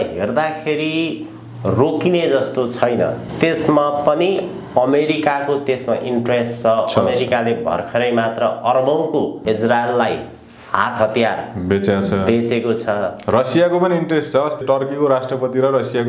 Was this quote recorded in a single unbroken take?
no; 3 cuts; at 3.2 s, 9.4 s, 14.6 s

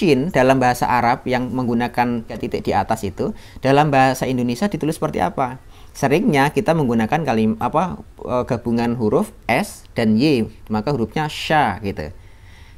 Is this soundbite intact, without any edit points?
no; 1 cut; at 2.3 s

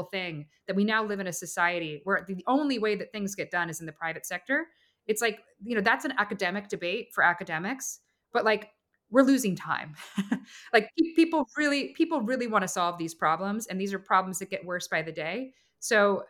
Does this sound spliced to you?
no; 0 cuts

